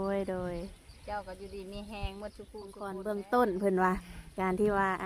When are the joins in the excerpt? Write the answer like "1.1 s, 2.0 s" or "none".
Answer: 3.0 s